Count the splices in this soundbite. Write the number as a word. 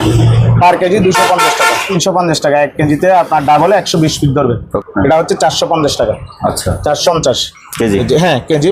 three